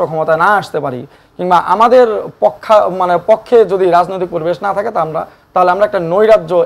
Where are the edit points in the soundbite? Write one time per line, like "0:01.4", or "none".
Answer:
none